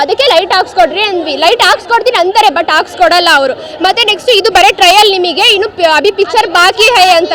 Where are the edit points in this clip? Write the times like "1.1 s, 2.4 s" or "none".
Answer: none